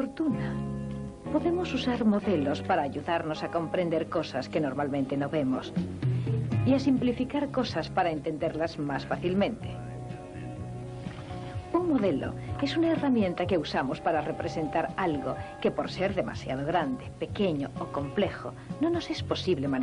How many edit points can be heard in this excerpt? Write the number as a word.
one